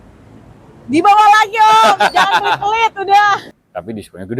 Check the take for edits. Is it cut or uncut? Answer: cut